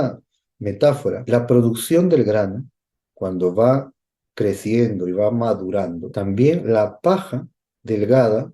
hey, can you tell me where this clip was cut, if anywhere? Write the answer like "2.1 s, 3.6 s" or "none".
1.2 s, 6.0 s